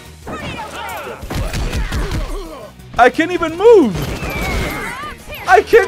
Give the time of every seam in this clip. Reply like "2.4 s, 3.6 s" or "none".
none